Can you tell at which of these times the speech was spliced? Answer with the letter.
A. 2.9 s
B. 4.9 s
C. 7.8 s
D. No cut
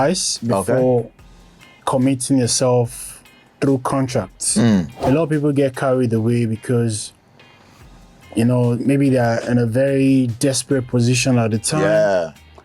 B